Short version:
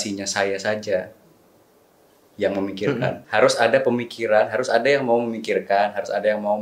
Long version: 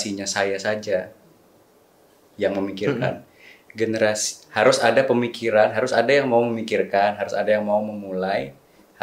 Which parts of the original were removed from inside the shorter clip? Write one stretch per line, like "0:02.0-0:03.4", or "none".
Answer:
0:03.2-0:04.5